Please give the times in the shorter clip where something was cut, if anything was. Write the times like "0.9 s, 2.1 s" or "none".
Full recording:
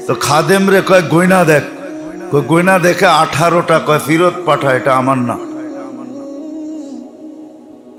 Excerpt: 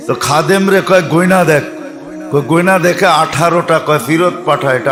none